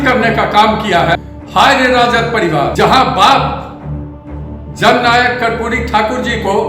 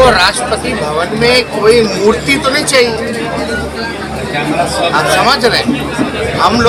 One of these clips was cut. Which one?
first; 2 cuts; at 1.2 s, 2.7 s

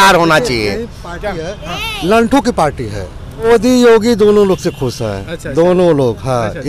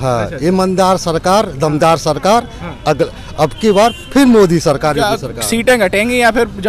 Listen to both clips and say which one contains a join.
first; 1 cut; at 3.5 s

